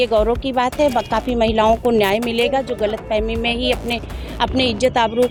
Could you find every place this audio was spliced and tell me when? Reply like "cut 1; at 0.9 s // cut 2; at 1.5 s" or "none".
none